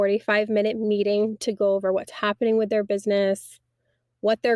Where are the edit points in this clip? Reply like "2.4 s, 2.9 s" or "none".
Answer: none